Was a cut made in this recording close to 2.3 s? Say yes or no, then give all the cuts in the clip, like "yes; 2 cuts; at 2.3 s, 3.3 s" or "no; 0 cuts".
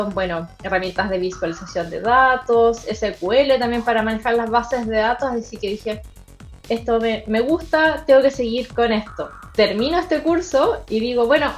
no; 1 cut; at 9.4 s